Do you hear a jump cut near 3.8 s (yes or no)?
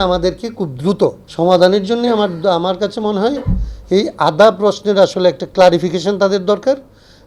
no